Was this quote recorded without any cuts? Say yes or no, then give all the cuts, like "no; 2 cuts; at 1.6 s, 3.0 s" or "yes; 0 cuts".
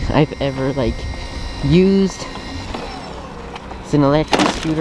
yes; 0 cuts